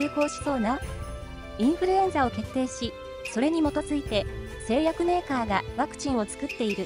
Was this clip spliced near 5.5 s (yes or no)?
no